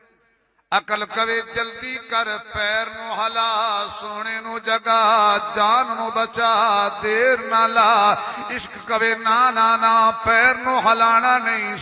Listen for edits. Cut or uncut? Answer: uncut